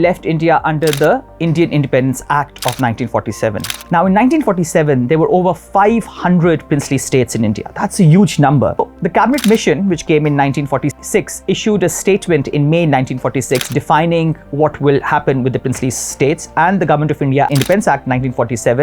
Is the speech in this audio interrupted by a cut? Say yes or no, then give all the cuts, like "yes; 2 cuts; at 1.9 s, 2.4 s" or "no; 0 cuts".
yes; 4 cuts; at 3.7 s, 8.8 s, 10.9 s, 17.5 s